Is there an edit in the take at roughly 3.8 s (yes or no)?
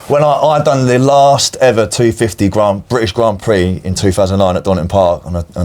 no